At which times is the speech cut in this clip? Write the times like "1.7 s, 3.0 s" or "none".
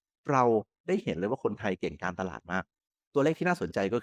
2.8 s